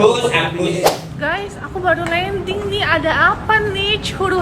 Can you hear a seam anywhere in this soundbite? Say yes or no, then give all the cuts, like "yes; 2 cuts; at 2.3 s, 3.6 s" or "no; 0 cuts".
yes; 1 cut; at 1.1 s